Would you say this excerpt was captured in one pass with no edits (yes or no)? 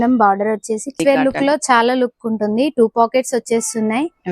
no